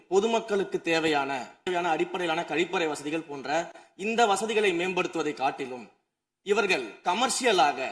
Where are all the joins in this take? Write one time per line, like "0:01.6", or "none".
0:01.6